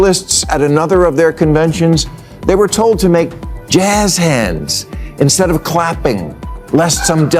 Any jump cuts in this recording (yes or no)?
no